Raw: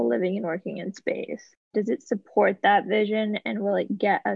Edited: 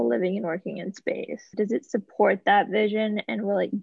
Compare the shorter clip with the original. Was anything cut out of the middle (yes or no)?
yes